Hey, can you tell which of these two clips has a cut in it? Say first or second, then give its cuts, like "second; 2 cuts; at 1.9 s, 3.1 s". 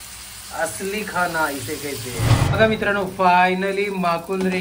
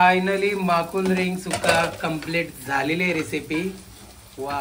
first; 1 cut; at 2.4 s